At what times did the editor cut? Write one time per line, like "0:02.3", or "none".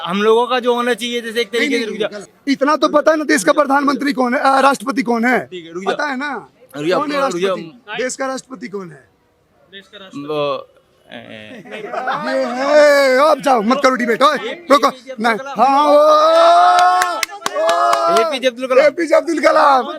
0:02.2